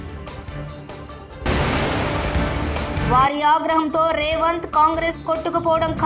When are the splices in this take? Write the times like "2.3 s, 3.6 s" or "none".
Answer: 0.9 s